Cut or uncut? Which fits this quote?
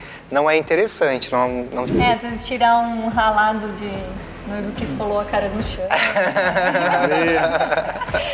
cut